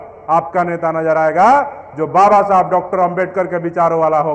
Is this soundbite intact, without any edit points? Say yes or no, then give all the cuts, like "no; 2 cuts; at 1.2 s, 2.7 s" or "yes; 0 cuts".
no; 1 cut; at 1.0 s